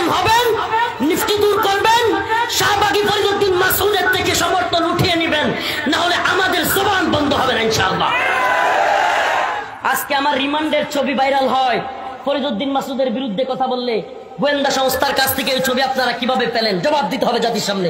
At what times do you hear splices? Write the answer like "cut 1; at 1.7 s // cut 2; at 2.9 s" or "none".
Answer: cut 1; at 1.2 s